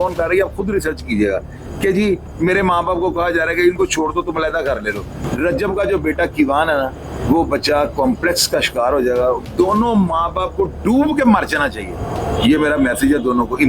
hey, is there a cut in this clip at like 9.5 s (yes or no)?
yes